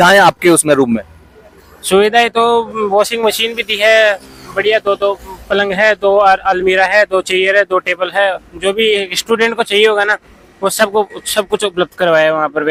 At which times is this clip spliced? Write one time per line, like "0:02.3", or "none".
none